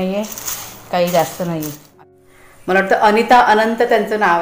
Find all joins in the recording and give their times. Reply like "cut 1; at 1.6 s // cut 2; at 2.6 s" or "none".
cut 1; at 1.9 s